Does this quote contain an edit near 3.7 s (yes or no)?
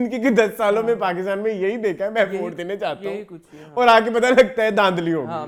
no